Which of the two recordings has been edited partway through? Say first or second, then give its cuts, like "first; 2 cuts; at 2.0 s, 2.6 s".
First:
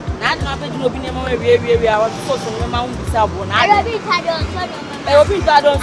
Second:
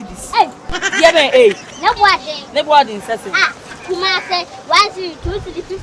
second; 1 cut; at 3.7 s